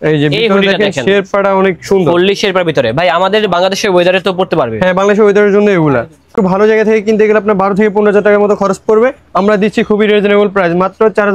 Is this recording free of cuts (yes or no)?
no